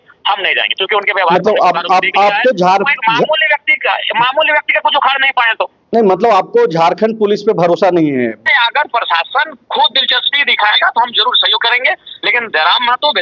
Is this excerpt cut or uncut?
cut